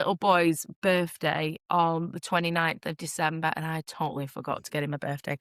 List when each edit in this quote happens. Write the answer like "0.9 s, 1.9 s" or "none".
none

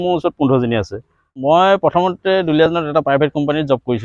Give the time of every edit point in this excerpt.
1.4 s

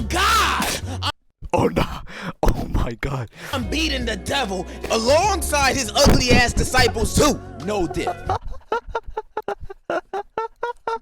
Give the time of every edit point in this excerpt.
none

